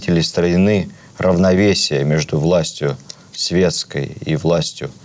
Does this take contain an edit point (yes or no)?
no